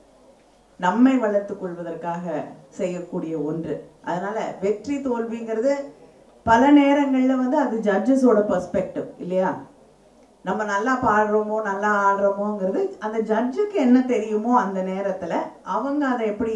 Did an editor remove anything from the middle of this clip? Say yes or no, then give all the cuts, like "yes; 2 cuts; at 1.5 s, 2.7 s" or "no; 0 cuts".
no; 0 cuts